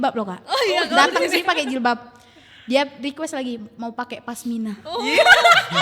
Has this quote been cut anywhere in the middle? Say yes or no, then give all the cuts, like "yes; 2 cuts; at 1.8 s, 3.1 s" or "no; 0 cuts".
no; 0 cuts